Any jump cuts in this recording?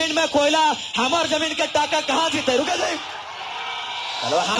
no; 0 cuts

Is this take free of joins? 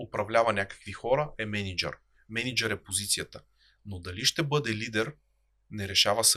yes; 0 cuts

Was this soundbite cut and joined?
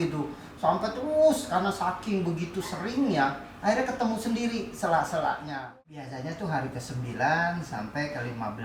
yes; 1 cut; at 5.6 s

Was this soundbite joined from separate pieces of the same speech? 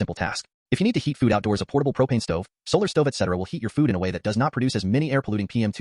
no; 0 cuts

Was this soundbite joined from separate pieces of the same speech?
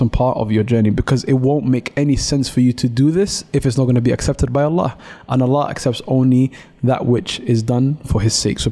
no; 0 cuts

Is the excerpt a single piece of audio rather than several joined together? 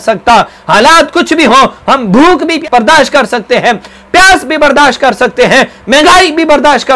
yes; 0 cuts

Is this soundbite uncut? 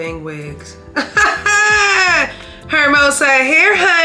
yes; 0 cuts

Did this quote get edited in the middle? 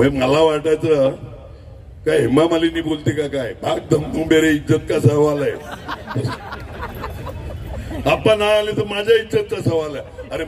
no; 0 cuts

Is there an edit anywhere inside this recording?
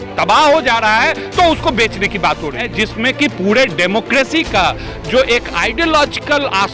yes; 1 cut; at 2.7 s

